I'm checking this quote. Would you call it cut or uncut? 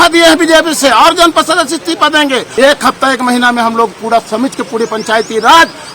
cut